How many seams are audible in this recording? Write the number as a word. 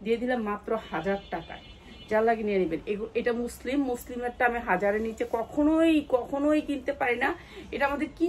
zero